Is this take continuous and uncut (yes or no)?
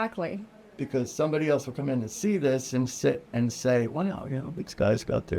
yes